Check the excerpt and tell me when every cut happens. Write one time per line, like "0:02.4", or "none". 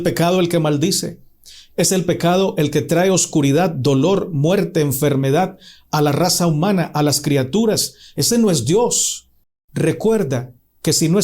0:09.2

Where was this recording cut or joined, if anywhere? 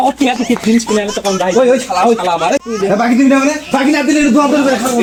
none

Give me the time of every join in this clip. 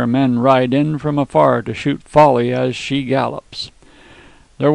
0:02.4

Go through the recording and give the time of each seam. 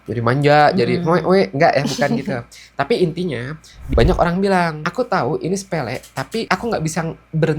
0:03.7
0:04.8
0:06.5

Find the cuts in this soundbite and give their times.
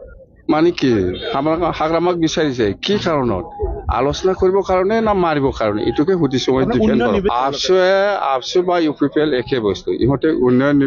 0:07.3

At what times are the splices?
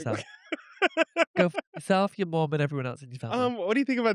none

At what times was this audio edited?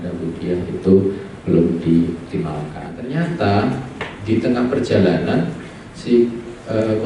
0:03.0

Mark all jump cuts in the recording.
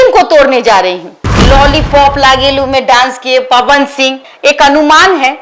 0:01.2
0:04.3

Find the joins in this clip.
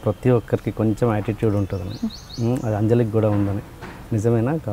none

